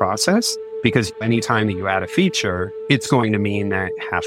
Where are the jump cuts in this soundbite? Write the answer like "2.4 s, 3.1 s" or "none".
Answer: 1.1 s, 2.7 s